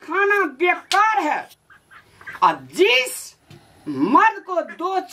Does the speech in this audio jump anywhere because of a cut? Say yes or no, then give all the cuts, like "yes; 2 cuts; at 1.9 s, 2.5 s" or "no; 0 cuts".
no; 0 cuts